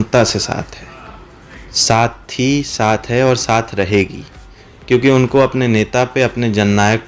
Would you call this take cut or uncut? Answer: uncut